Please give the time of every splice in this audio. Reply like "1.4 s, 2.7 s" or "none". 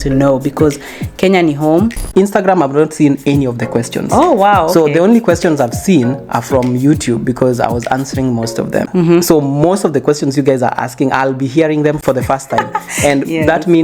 2.1 s